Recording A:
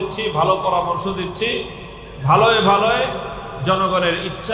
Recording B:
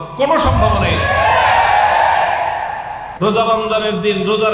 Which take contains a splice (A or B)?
B